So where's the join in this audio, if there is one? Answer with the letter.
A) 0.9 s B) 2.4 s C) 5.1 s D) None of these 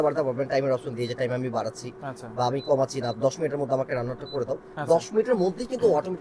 D